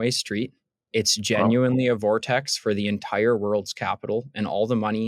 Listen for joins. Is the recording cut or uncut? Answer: uncut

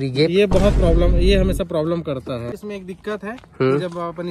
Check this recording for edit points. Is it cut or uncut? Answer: cut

